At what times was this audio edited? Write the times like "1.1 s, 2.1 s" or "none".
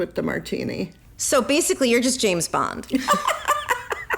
0.9 s